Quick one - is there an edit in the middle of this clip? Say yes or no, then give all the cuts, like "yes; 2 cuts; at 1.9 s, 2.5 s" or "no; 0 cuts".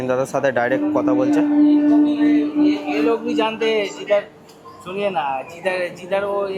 no; 0 cuts